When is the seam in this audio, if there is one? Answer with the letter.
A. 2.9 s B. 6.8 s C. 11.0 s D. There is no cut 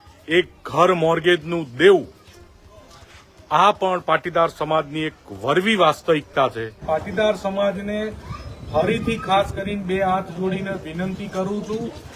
B